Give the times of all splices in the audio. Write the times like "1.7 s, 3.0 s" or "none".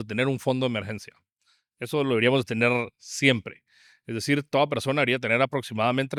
none